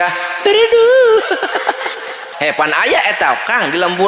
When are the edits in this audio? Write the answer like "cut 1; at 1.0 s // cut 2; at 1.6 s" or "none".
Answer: cut 1; at 2.3 s